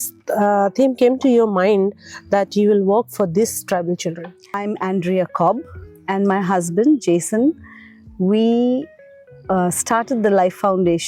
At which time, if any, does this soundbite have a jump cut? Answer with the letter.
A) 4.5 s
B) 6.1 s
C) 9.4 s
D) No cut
A